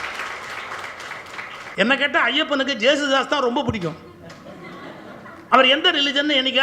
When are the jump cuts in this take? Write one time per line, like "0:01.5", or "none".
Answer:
0:01.7
0:05.4